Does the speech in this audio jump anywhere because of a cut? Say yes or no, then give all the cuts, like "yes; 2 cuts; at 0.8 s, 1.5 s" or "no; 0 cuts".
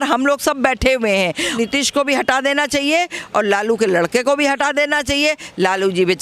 yes; 1 cut; at 1.5 s